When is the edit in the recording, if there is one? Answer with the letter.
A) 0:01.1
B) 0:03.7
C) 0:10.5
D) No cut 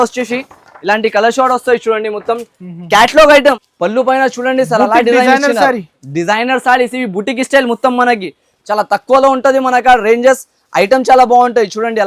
B